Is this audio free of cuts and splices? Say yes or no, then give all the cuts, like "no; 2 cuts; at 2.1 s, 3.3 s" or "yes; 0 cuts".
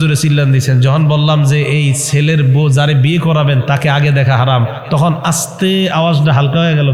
yes; 0 cuts